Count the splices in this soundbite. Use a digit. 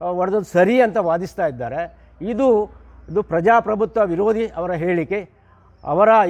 0